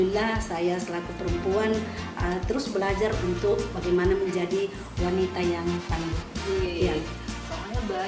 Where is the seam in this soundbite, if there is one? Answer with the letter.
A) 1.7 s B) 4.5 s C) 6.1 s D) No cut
D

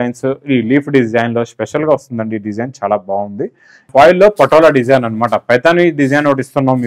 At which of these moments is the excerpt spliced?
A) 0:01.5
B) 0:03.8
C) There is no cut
B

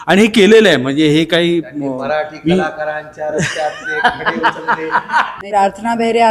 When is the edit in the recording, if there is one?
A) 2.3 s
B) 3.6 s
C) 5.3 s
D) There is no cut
C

